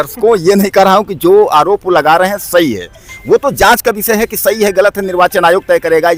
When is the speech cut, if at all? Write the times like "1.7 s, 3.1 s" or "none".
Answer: none